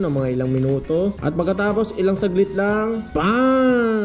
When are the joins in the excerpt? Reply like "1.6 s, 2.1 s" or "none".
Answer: 3.1 s